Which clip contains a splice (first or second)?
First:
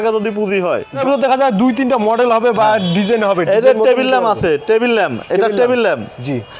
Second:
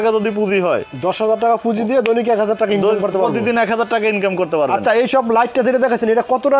first